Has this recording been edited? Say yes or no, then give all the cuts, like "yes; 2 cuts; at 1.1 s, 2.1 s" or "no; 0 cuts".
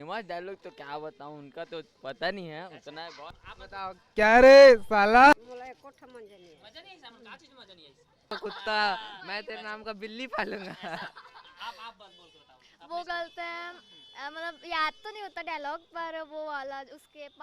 yes; 3 cuts; at 3.4 s, 5.3 s, 8.3 s